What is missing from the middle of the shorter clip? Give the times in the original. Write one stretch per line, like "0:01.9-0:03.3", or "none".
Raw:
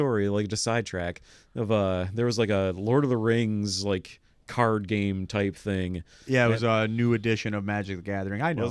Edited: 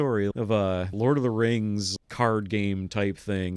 0:00.9-0:02.7
0:03.8-0:04.3